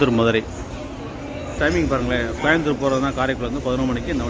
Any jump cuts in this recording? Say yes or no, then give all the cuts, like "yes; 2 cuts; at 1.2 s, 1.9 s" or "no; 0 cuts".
yes; 1 cut; at 1.5 s